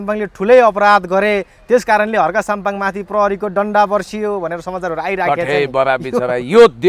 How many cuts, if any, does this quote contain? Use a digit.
0